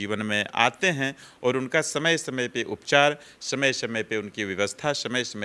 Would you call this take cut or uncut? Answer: uncut